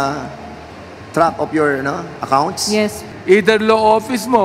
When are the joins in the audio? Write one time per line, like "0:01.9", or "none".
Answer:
0:03.1